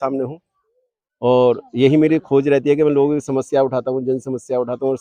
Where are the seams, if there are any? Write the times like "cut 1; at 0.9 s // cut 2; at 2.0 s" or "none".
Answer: none